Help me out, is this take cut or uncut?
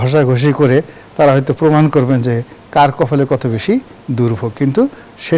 uncut